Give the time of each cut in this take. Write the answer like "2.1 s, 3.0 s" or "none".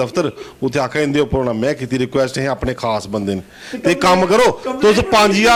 none